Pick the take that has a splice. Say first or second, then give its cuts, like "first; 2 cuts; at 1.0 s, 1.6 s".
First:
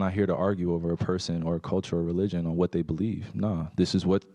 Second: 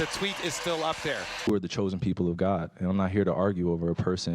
second; 1 cut; at 1.2 s